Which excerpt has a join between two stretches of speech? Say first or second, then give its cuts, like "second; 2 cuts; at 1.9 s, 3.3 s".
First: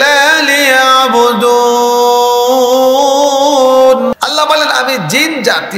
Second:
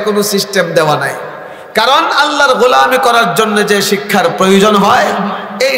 first; 1 cut; at 4.1 s